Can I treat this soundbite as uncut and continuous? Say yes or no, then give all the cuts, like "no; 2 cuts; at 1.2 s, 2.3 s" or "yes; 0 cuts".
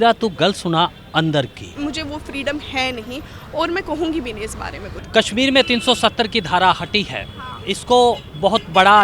no; 2 cuts; at 1.7 s, 4.9 s